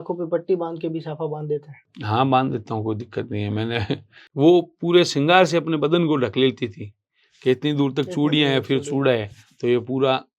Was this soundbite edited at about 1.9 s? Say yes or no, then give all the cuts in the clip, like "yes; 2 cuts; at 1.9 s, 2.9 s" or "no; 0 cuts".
no; 1 cut; at 4.2 s